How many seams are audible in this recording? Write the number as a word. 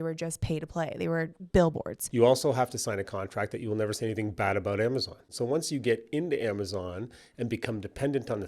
two